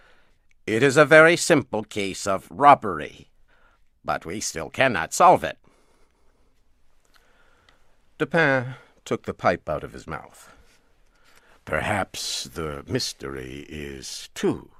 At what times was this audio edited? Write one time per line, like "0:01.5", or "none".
none